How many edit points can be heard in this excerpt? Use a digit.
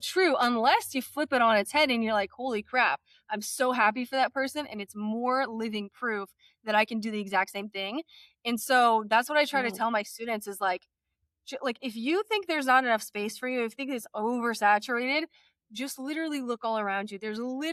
0